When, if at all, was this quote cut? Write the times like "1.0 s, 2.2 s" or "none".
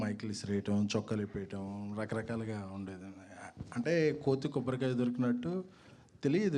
none